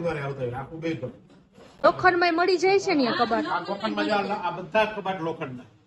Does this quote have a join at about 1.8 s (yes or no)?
yes